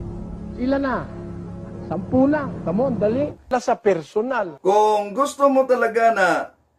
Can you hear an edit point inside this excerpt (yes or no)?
yes